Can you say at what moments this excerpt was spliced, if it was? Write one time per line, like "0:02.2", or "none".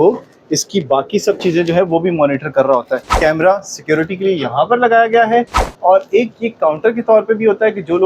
0:03.1